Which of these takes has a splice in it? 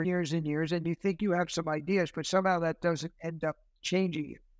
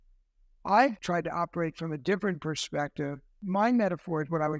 second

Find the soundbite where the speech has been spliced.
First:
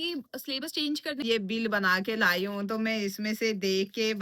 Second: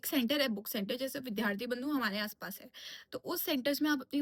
first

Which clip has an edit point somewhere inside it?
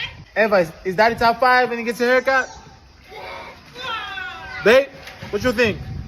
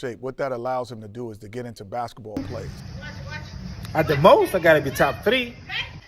second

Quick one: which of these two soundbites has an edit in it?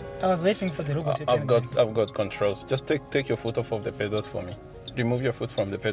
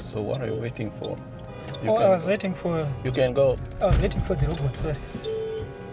first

